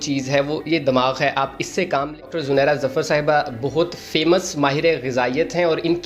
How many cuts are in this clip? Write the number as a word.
one